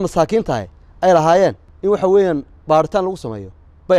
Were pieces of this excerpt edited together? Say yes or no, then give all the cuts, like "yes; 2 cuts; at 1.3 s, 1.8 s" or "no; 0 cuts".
yes; 1 cut; at 1.7 s